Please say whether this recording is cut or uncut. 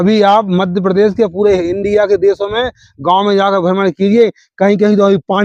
uncut